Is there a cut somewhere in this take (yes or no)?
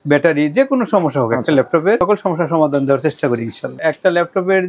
yes